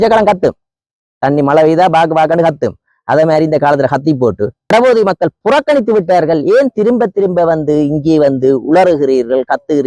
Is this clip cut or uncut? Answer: cut